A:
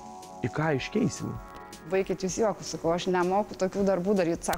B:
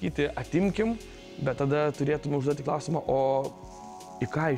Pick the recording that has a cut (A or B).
A